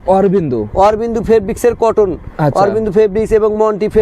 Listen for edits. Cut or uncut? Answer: uncut